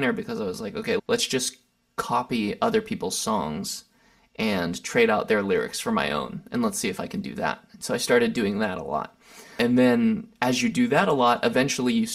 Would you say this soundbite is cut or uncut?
cut